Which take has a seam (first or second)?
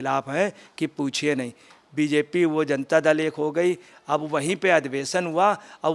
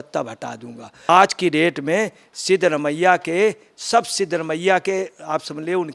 second